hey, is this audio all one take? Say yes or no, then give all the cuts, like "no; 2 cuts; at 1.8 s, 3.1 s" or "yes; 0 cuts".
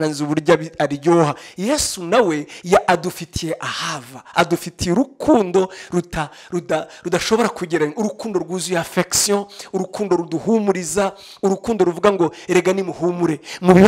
yes; 0 cuts